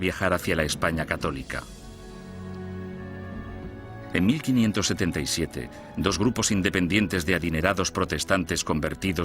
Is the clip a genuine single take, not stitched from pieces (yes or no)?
no